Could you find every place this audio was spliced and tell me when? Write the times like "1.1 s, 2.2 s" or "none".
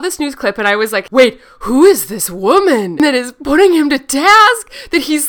1.1 s, 3.0 s